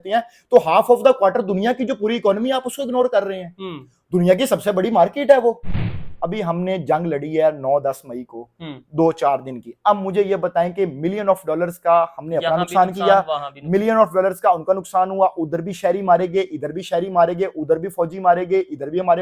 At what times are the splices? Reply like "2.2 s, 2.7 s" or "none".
5.8 s